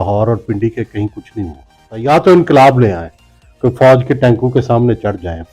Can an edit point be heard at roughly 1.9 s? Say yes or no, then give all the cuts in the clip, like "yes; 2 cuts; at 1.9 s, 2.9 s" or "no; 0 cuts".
yes; 1 cut; at 1.9 s